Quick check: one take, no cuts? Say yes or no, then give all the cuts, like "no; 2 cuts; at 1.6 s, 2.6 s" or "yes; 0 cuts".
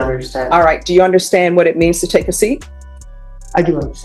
yes; 0 cuts